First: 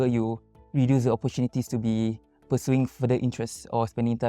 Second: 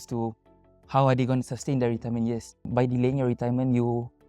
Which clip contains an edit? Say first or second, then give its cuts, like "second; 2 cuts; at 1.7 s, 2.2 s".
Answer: second; 1 cut; at 2.7 s